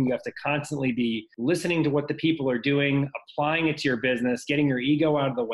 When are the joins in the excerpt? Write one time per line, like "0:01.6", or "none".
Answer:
0:01.3